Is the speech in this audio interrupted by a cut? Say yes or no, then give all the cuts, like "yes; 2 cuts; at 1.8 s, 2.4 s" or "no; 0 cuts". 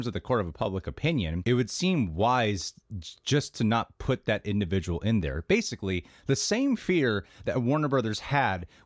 yes; 1 cut; at 1.4 s